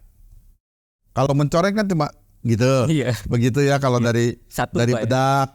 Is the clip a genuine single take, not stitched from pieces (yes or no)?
yes